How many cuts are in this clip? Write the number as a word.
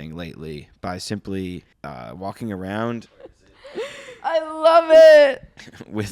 two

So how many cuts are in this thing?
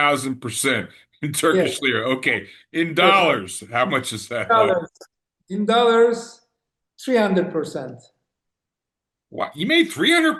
zero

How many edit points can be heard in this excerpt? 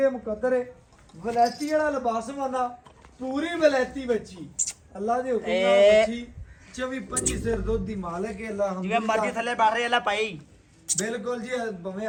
zero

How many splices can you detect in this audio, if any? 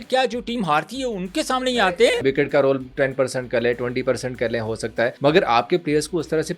two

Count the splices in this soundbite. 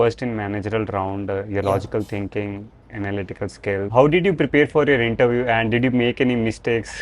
one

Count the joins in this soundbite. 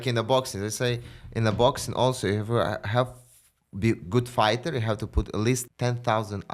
one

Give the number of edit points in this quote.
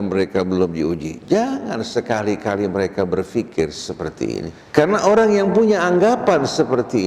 one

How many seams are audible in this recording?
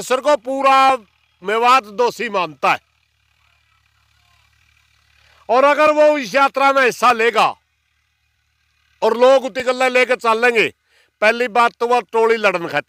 zero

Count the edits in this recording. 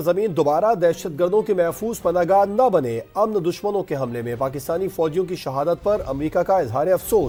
zero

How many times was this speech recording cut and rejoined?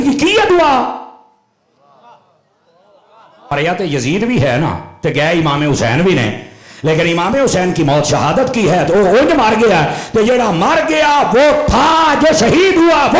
one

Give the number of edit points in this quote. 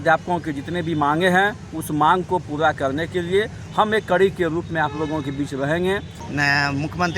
one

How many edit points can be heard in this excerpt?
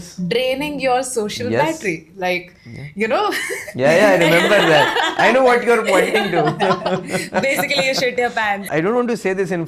one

